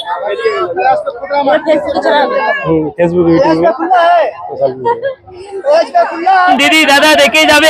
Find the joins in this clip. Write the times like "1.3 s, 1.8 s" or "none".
6.5 s

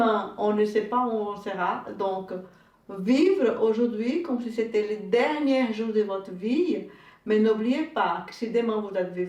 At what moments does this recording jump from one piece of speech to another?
none

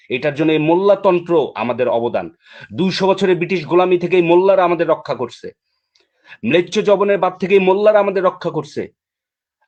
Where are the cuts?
none

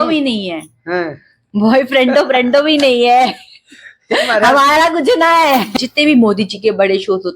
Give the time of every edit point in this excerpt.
5.8 s

